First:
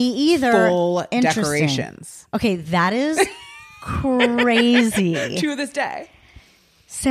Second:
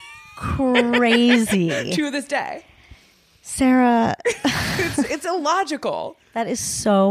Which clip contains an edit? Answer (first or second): second